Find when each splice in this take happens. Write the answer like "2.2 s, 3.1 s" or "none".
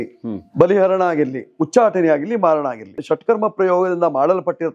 2.9 s